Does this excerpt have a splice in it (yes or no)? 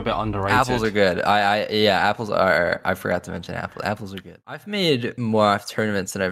yes